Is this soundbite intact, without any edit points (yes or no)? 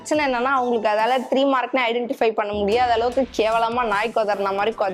yes